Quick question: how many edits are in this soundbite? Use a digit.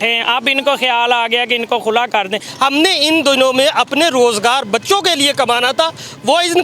1